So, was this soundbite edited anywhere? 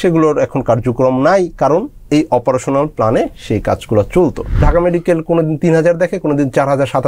yes; 1 cut; at 4.6 s

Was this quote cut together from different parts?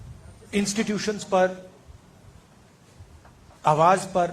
no; 0 cuts

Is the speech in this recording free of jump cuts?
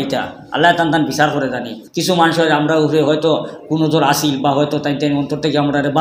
no; 1 cut; at 1.8 s

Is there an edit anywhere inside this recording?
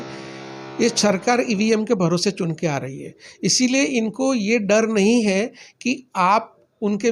no; 0 cuts

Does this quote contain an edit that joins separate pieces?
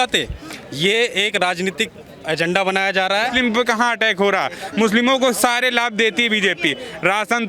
yes; 1 cut; at 3.3 s

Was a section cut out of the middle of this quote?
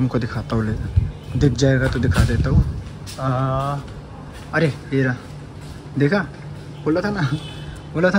no; 0 cuts

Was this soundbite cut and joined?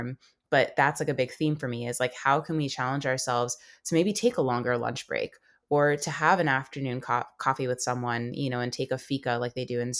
no; 0 cuts

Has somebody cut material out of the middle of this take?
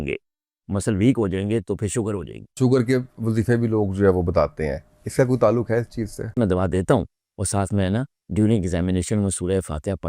yes; 2 cuts; at 2.6 s, 6.3 s

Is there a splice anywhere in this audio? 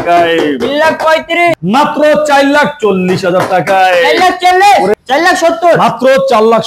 yes; 2 cuts; at 1.5 s, 4.9 s

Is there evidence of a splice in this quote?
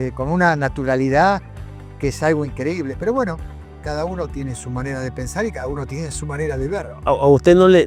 no; 0 cuts

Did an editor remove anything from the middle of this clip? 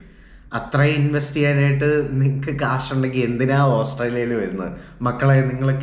no; 0 cuts

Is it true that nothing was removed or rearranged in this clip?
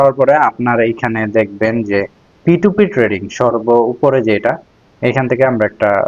yes; 0 cuts

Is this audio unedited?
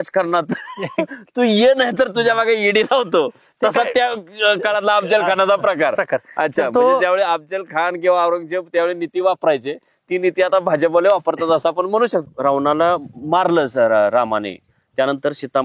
no; 1 cut; at 12.3 s

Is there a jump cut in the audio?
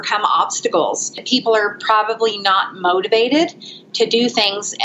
yes; 1 cut; at 1.2 s

